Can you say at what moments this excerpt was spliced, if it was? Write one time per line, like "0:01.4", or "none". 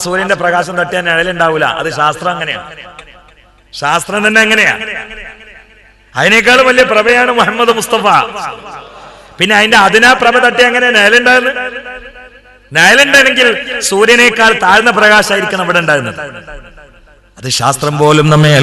none